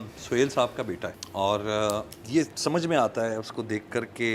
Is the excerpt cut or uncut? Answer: cut